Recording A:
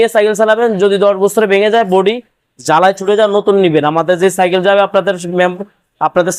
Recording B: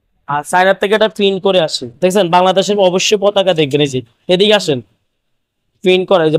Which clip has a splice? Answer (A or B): B